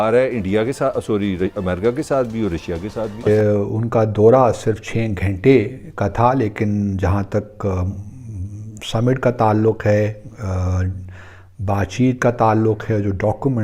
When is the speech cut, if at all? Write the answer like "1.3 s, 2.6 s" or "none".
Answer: 3.3 s